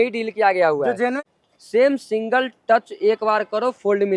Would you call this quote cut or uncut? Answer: cut